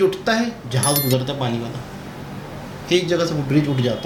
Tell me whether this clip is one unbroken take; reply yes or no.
yes